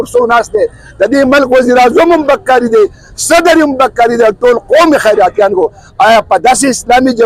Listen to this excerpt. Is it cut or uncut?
uncut